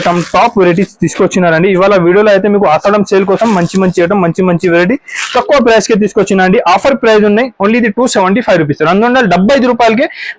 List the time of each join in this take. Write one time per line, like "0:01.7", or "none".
none